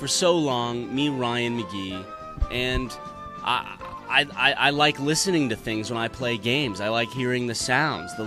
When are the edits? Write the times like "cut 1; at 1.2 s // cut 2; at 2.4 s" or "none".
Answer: none